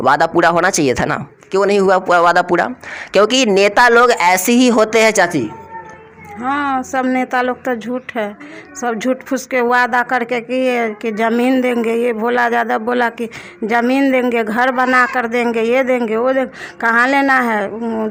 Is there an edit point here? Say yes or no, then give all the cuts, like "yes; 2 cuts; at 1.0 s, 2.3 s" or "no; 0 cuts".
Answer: no; 0 cuts